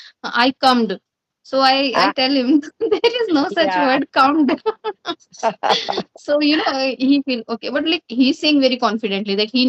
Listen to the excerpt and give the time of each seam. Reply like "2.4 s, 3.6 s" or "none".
none